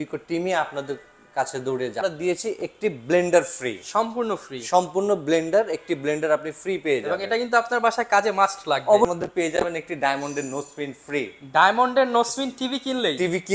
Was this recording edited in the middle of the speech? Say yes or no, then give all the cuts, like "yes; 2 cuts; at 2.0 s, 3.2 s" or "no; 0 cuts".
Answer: yes; 2 cuts; at 2.0 s, 9.1 s